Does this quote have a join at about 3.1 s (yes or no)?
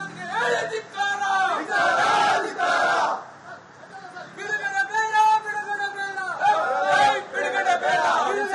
yes